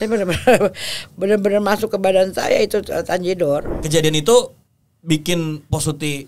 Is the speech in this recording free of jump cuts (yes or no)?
no